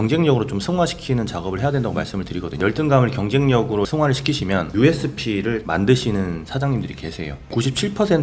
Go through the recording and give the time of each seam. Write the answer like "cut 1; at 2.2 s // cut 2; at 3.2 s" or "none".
cut 1; at 2.6 s // cut 2; at 4.4 s // cut 3; at 5.6 s // cut 4; at 7.4 s